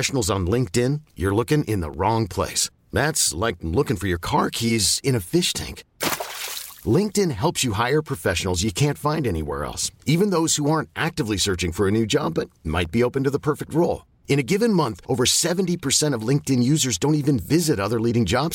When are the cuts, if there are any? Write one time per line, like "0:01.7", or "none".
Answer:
none